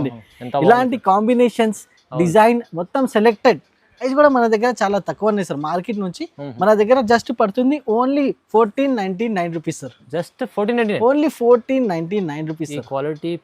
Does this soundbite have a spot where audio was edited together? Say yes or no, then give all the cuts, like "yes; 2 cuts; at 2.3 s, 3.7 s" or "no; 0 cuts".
yes; 1 cut; at 4.1 s